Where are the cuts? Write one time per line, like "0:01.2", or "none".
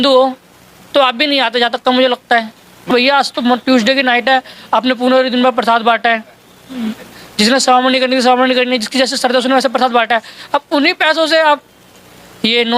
0:02.8